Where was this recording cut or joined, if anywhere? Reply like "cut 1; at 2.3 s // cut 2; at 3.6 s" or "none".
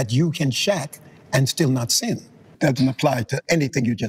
cut 1; at 2.5 s